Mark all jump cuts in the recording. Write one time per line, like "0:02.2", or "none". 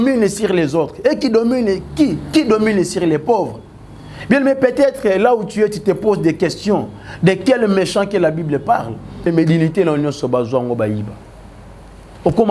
0:09.2